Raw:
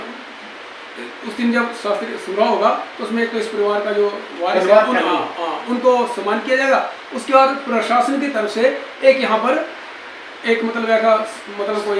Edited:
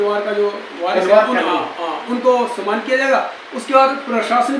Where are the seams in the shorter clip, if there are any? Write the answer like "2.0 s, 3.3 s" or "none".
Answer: none